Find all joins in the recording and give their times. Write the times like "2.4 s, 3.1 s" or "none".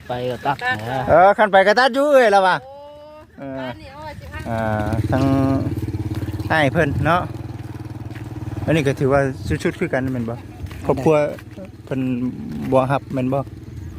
4.3 s